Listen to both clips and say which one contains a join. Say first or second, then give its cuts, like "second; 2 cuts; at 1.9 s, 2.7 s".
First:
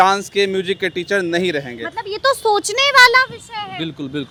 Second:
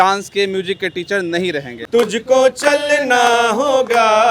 second; 1 cut; at 1.8 s